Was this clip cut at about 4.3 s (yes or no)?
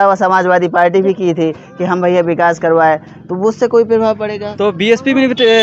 no